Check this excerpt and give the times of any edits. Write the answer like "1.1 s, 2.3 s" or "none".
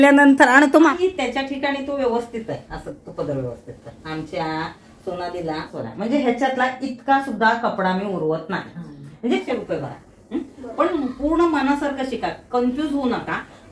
0.9 s, 5.7 s, 9.4 s